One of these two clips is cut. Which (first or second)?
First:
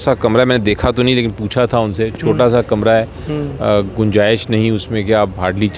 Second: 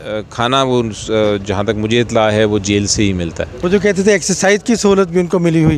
second